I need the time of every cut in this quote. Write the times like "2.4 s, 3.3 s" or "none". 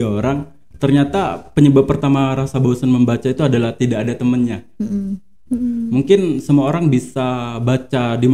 5.3 s